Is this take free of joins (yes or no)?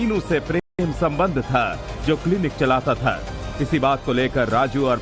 yes